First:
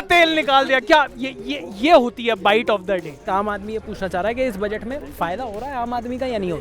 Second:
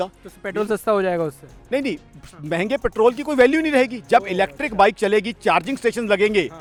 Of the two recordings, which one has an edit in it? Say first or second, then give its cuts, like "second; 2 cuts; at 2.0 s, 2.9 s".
first; 1 cut; at 3.3 s